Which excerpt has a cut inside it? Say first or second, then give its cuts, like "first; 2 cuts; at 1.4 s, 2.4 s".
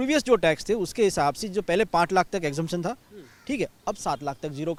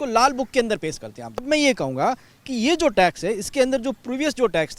second; 1 cut; at 1.4 s